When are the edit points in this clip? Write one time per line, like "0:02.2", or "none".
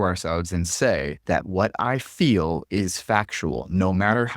0:01.1